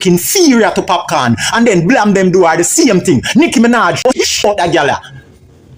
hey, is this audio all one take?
no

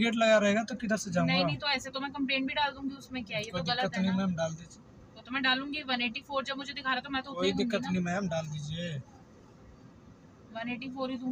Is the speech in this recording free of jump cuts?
yes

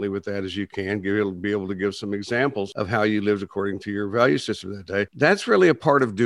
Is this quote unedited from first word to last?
no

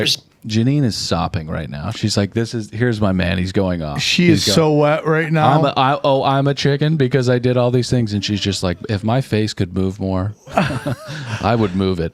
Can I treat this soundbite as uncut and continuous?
yes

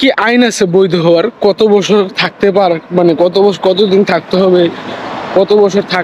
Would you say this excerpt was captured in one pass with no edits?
yes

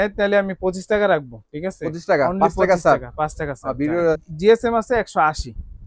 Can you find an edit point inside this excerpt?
yes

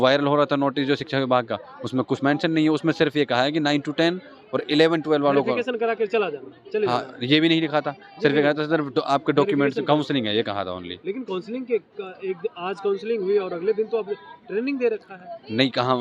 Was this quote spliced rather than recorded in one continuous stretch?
no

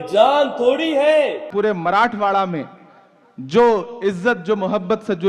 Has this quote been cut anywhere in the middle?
yes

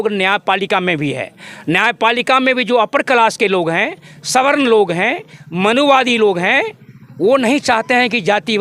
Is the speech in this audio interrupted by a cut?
no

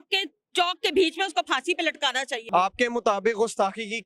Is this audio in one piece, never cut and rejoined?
no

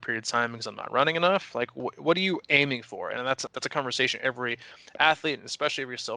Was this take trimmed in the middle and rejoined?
yes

